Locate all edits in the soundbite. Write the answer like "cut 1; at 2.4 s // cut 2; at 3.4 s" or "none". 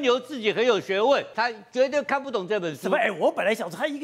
cut 1; at 1.3 s